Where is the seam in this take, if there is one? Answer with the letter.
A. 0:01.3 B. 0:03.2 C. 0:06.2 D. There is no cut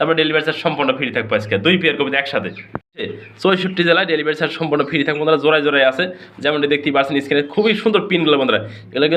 B